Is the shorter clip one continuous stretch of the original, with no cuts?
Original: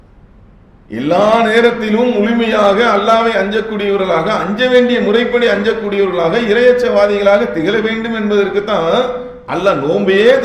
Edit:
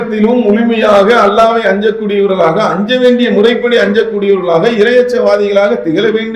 yes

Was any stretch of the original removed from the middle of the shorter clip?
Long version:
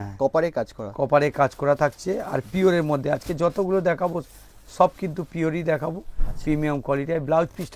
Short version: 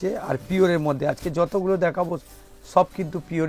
no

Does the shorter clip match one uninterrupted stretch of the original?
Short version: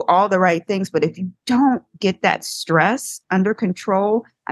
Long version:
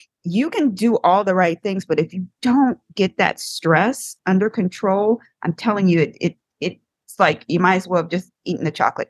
yes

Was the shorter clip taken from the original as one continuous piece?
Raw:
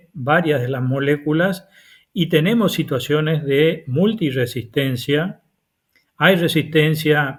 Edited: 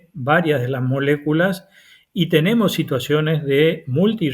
yes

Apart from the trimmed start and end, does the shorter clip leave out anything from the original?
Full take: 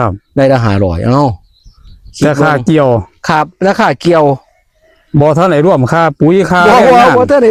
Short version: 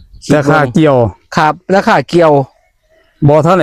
no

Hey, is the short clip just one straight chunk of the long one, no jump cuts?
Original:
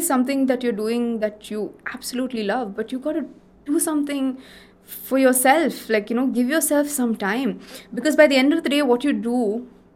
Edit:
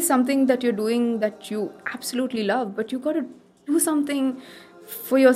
yes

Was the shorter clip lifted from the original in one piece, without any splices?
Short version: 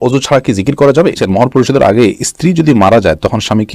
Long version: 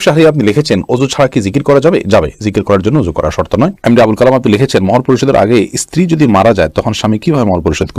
no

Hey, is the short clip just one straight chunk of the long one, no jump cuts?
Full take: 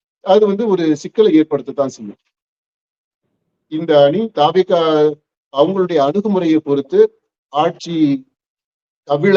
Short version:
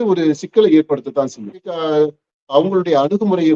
no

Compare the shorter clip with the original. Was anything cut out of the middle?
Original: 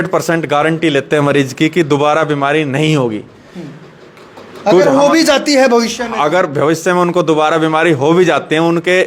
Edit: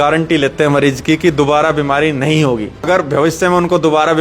yes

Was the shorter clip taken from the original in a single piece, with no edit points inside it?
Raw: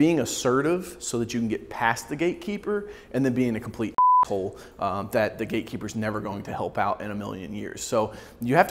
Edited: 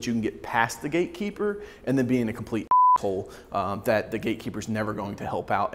yes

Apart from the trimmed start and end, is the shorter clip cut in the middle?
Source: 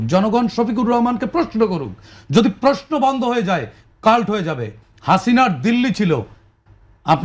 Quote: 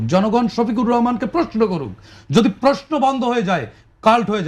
no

